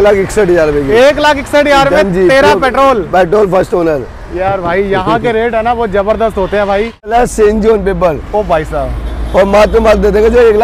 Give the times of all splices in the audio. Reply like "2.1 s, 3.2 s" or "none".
7.1 s